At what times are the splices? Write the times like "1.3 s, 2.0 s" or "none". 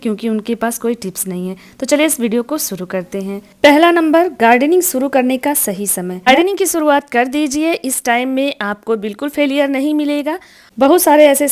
6.3 s, 10.6 s